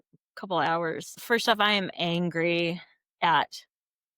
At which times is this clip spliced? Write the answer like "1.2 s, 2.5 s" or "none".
1.1 s